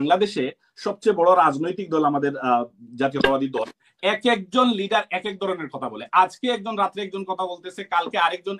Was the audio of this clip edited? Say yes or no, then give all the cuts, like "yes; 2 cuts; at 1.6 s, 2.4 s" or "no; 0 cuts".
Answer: no; 0 cuts